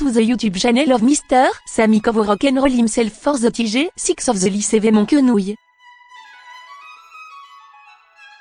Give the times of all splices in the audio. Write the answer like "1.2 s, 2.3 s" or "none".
5.7 s